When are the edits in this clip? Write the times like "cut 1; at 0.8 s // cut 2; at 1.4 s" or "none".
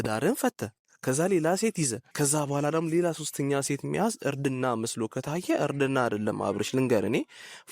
cut 1; at 2.0 s

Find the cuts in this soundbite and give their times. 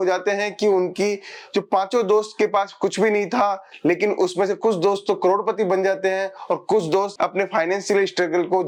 none

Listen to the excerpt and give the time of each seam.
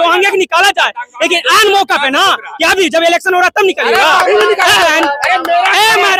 none

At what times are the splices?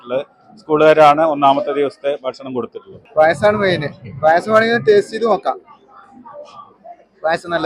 cut 1; at 3.0 s

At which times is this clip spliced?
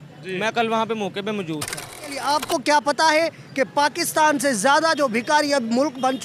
cut 1; at 2.2 s

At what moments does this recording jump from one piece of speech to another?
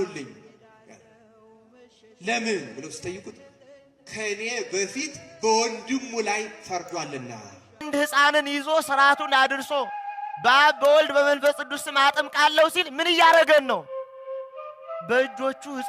cut 1; at 7.9 s

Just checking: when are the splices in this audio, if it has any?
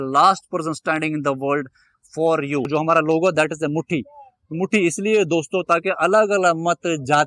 cut 1; at 2.7 s

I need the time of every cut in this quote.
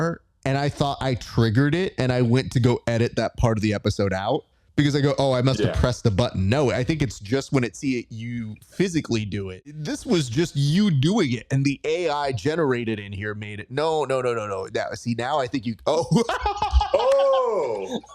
cut 1; at 9.8 s

